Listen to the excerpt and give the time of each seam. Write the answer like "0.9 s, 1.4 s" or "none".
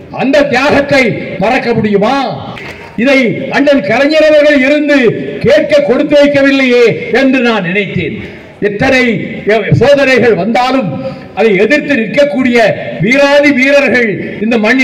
2.8 s